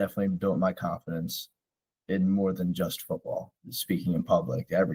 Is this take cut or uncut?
uncut